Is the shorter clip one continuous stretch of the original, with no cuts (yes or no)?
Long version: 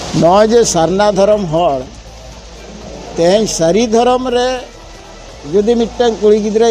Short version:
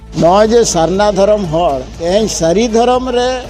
no